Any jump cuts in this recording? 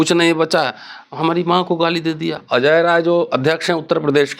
yes; 1 cut; at 2.4 s

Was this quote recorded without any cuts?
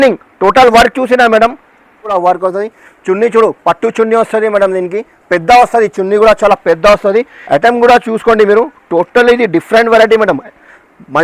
no; 2 cuts; at 2.0 s, 7.4 s

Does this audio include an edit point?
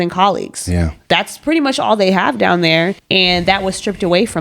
yes; 1 cut; at 3.0 s

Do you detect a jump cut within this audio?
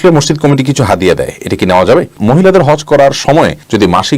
yes; 1 cut; at 2.1 s

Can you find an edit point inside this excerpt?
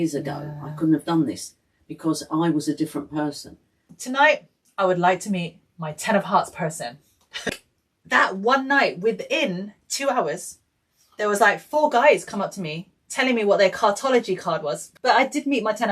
yes; 3 cuts; at 3.9 s, 7.5 s, 14.8 s

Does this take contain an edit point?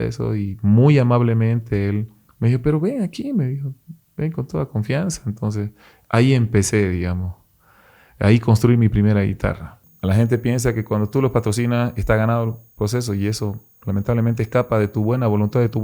yes; 1 cut; at 9.9 s

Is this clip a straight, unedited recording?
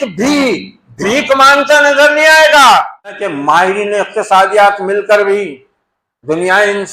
no; 1 cut; at 3.2 s

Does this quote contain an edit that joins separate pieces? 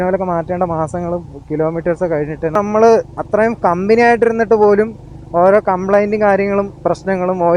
yes; 1 cut; at 2.5 s

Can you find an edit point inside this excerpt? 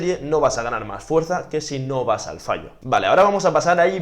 yes; 1 cut; at 2.7 s

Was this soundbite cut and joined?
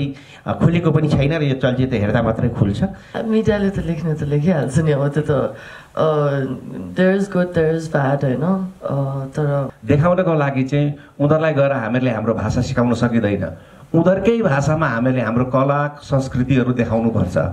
yes; 2 cuts; at 3.0 s, 9.7 s

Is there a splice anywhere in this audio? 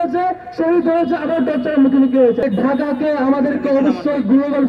yes; 1 cut; at 2.4 s

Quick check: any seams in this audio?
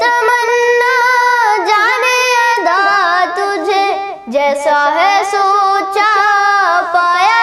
no; 0 cuts

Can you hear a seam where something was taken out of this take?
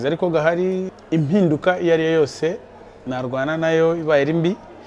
yes; 1 cut; at 0.9 s

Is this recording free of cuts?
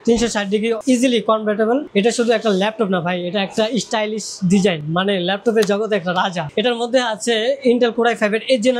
yes; 0 cuts

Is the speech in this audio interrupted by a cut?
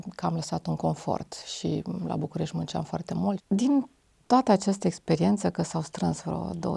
yes; 1 cut; at 3.4 s

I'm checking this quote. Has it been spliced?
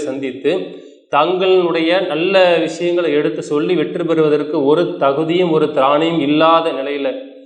no; 0 cuts

